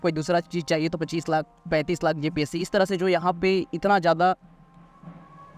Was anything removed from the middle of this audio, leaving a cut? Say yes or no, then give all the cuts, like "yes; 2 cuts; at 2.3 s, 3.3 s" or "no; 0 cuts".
no; 0 cuts